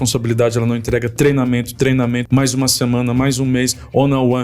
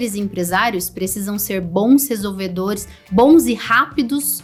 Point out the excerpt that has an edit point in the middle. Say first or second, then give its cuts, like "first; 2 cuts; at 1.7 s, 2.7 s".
first; 1 cut; at 2.2 s